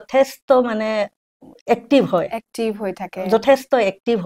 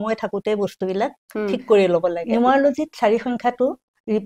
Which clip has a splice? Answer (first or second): second